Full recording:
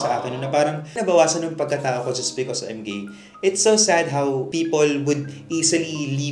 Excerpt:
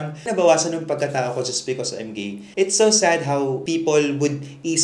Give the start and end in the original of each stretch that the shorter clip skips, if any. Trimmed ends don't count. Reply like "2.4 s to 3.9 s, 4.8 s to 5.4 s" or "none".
3.1 s to 3.3 s